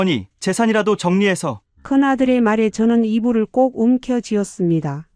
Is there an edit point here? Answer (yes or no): no